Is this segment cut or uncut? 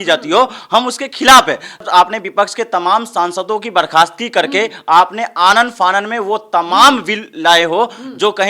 cut